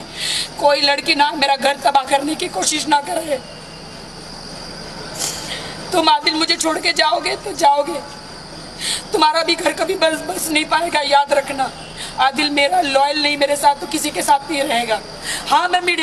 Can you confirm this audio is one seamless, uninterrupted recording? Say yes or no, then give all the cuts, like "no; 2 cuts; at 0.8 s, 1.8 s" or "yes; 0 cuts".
yes; 0 cuts